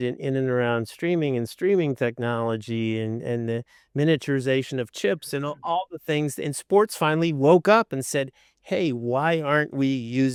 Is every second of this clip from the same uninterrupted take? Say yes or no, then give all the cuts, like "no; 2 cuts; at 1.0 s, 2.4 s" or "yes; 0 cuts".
yes; 0 cuts